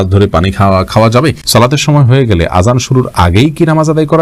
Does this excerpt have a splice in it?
yes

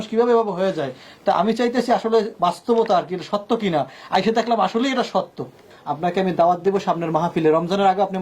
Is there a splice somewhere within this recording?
yes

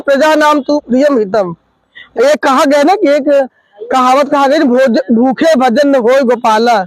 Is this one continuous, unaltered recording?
no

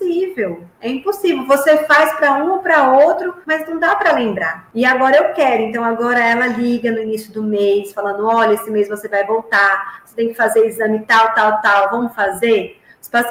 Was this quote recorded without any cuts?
yes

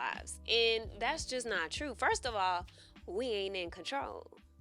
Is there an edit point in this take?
no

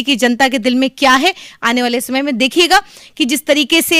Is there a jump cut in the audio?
no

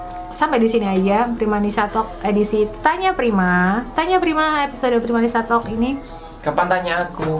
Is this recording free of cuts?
yes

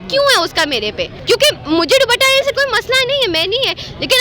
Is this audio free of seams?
no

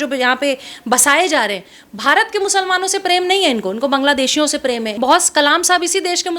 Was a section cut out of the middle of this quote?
yes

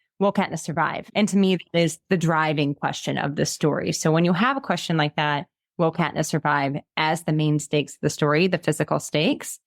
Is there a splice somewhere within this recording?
yes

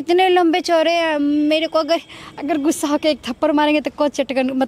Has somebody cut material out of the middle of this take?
no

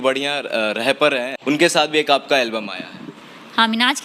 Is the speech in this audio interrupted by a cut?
yes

